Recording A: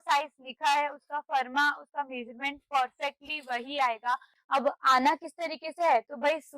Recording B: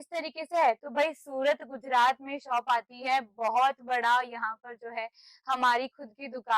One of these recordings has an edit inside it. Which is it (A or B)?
A